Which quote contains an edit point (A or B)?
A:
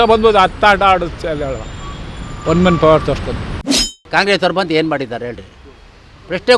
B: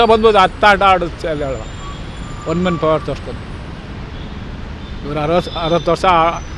A